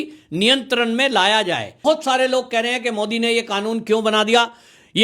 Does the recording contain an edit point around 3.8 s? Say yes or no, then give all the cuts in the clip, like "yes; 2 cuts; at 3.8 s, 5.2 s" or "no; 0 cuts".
no; 1 cut; at 1.7 s